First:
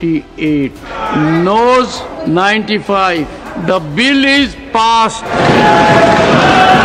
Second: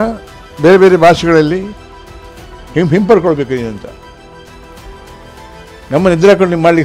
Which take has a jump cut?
first; 4 cuts; at 1.0 s, 2.1 s, 3.5 s, 5.3 s

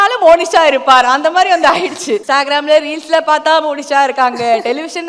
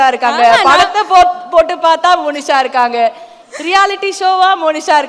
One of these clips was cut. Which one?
first; 1 cut; at 2.2 s

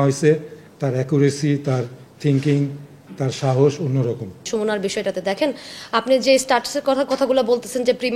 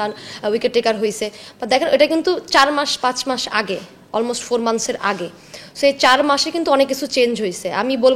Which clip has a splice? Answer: first; 1 cut; at 4.4 s

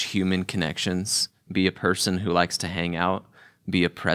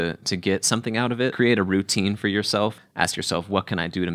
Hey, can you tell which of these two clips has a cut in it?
second; 2 cuts; at 1.3 s, 2.8 s

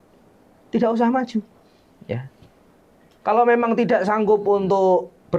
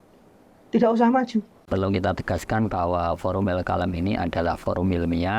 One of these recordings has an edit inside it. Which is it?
second; 1 cut; at 1.6 s

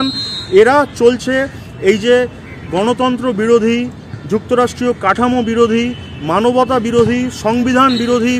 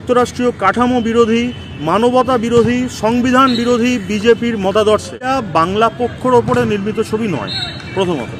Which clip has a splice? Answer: second; 1 cut; at 5.2 s

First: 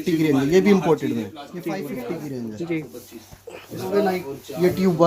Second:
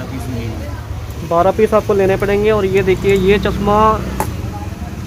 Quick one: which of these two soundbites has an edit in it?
first; 2 cuts; at 1.9 s, 3.9 s

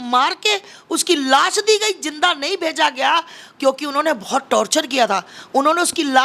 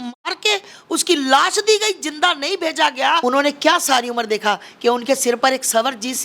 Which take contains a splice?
second; 1 cut; at 3.2 s

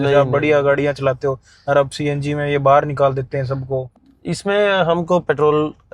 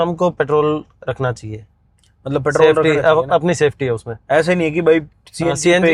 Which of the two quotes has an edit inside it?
first; 1 cut; at 3.9 s

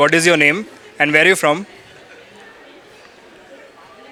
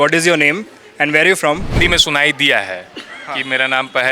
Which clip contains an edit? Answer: second; 1 cut; at 1.8 s

